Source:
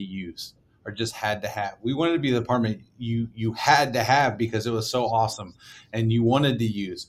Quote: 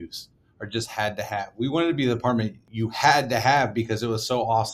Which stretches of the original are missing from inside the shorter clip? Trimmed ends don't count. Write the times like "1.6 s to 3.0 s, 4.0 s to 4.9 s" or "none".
2.9 s to 3.3 s